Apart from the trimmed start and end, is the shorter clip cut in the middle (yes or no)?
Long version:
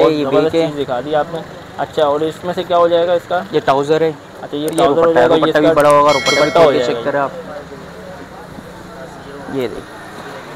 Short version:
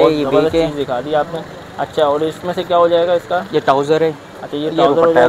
no